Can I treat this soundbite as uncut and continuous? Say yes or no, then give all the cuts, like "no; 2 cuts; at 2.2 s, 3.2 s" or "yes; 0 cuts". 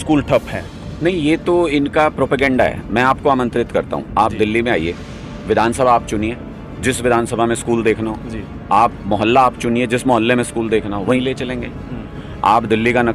no; 1 cut; at 12.1 s